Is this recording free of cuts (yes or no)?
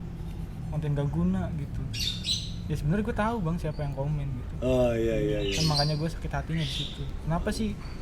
yes